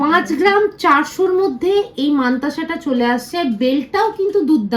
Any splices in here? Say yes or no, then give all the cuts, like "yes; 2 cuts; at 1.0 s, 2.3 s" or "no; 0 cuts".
no; 0 cuts